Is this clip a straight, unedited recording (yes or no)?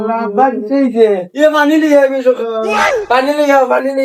yes